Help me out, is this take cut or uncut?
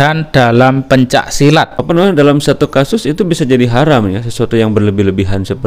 cut